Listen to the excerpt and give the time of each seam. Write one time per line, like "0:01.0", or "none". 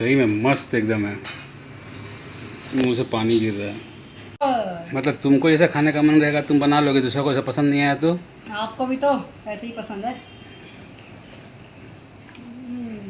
0:04.4